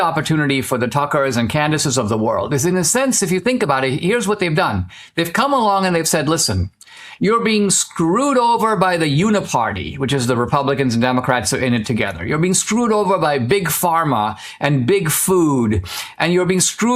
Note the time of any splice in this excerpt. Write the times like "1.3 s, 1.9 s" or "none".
none